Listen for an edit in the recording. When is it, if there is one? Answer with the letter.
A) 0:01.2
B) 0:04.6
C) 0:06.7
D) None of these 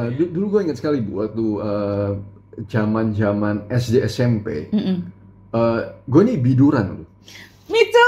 D